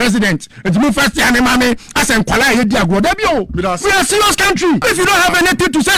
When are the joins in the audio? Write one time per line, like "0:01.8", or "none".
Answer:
0:04.8